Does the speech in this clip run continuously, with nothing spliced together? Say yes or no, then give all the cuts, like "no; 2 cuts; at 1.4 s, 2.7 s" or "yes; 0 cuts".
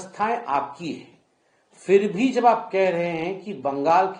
yes; 0 cuts